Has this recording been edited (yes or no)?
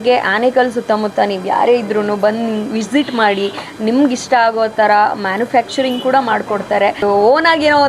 yes